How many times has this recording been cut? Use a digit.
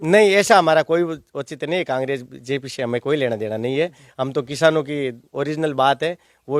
0